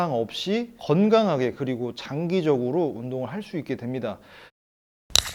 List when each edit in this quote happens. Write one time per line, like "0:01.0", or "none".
0:04.3